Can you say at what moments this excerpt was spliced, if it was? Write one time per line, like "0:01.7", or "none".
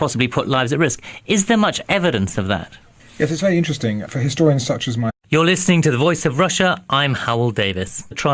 none